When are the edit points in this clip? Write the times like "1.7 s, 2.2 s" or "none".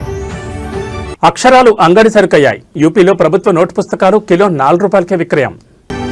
1.0 s